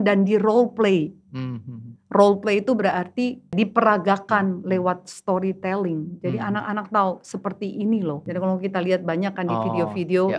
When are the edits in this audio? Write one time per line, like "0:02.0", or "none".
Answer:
0:03.5
0:08.2